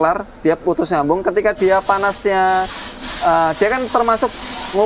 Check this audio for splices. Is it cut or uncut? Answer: uncut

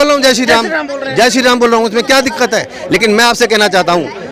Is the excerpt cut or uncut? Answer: uncut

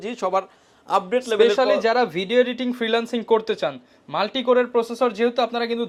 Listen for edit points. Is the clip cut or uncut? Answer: uncut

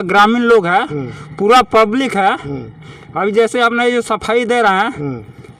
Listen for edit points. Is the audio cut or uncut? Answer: uncut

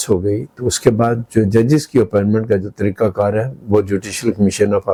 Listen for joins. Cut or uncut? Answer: uncut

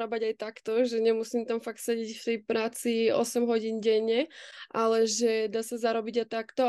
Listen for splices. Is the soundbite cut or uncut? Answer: uncut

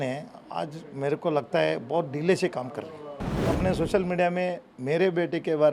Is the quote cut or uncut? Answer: cut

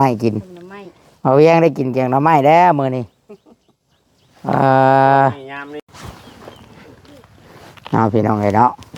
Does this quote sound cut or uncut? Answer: cut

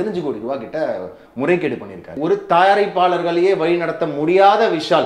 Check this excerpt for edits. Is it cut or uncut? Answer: cut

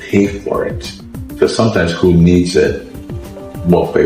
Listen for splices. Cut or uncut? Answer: uncut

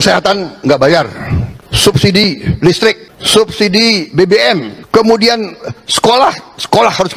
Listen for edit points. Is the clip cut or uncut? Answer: cut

